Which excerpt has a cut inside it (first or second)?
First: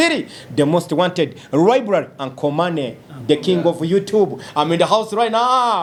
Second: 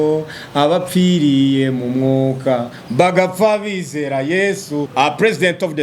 second